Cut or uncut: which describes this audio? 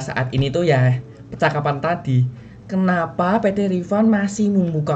uncut